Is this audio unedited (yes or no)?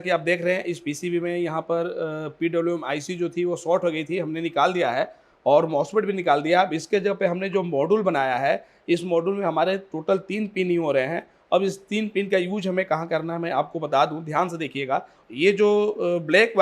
no